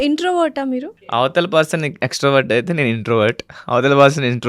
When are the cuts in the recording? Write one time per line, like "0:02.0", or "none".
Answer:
0:01.0